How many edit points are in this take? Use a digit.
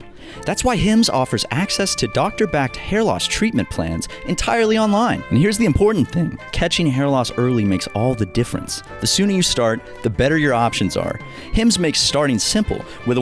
0